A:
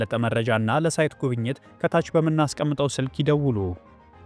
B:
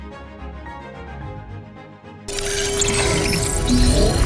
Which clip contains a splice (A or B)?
B